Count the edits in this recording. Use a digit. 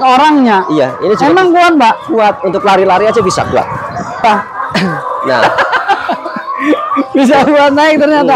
1